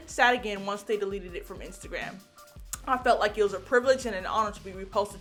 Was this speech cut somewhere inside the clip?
no; 0 cuts

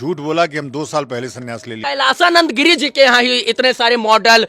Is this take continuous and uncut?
no; 1 cut; at 1.8 s

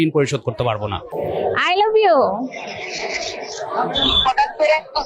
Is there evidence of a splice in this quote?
yes; 1 cut; at 1.0 s

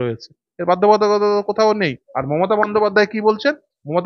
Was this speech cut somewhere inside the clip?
yes; 1 cut; at 2.1 s

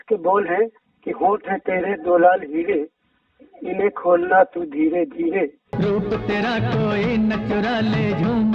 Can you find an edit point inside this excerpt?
yes; 2 cuts; at 3.0 s, 5.6 s

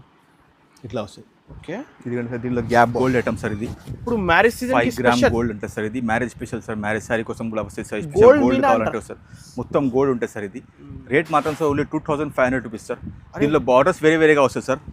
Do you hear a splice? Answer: yes; 1 cut; at 2.9 s

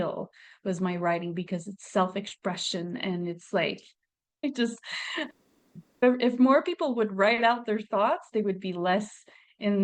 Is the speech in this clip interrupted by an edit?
yes; 1 cut; at 4.4 s

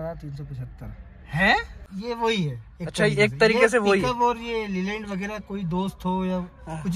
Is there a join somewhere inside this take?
yes; 1 cut; at 1.8 s

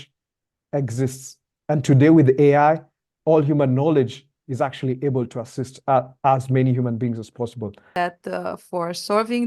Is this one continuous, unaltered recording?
no; 1 cut; at 7.9 s

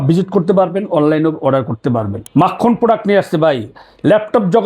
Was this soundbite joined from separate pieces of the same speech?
yes; 1 cut; at 2.2 s

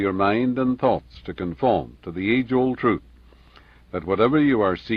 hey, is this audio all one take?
yes; 0 cuts

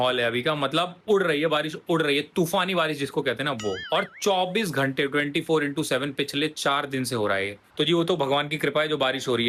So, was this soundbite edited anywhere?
no; 0 cuts

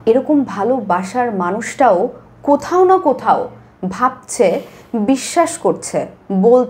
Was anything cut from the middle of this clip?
no; 0 cuts

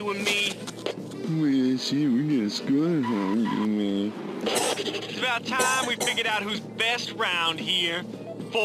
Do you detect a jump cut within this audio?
no; 0 cuts

